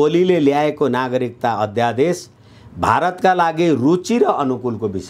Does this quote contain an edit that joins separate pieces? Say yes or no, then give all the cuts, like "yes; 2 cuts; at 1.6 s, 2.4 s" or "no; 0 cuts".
no; 0 cuts